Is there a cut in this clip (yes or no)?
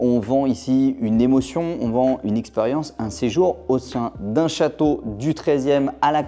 no